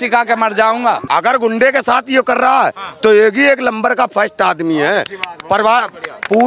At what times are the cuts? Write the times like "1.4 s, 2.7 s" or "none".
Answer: 1.0 s